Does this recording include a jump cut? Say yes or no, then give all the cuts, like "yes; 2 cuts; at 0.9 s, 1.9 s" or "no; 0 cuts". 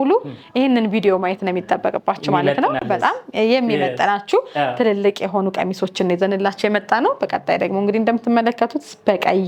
no; 0 cuts